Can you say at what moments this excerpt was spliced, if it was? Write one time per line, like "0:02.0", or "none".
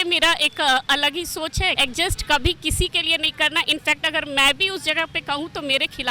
0:01.8